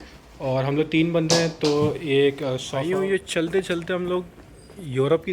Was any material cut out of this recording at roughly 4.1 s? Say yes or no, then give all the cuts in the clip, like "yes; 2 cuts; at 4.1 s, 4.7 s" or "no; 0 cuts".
no; 1 cut; at 2.8 s